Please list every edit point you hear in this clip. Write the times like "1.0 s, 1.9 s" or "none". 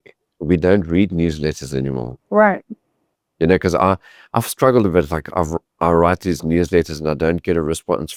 none